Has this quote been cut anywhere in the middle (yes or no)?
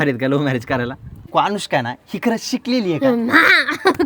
yes